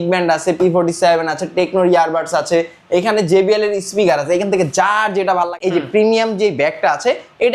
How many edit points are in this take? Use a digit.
1